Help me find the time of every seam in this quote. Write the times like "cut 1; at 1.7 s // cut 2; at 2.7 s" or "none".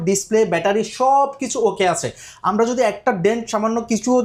none